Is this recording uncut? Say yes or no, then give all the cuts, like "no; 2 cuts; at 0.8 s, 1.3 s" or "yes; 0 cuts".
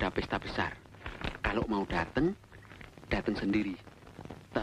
yes; 0 cuts